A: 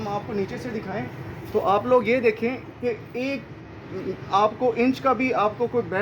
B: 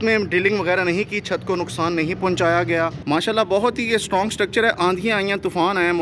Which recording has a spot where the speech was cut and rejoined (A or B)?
B